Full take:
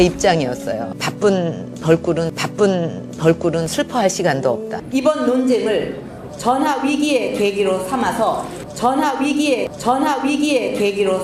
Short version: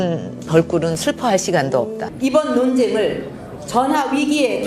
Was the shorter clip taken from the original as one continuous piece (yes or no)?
yes